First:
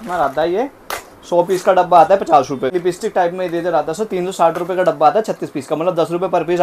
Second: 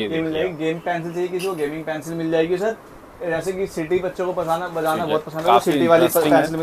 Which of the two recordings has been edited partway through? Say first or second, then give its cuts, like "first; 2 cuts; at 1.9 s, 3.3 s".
first; 1 cut; at 2.7 s